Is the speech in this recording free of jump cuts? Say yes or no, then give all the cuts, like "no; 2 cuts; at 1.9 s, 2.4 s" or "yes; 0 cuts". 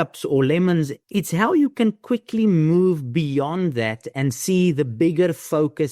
no; 1 cut; at 1.0 s